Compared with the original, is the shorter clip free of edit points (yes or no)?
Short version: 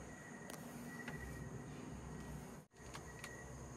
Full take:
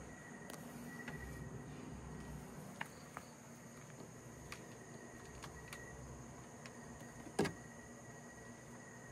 no